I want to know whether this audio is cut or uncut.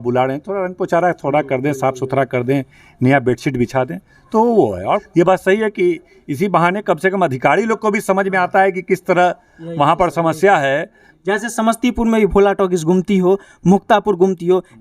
cut